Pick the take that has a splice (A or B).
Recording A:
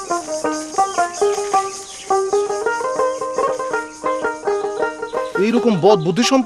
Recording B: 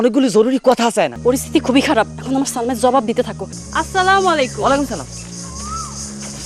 B